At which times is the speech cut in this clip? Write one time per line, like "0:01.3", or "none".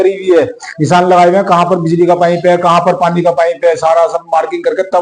none